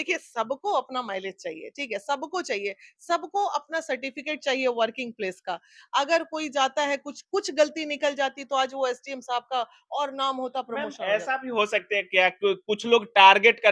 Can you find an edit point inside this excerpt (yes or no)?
no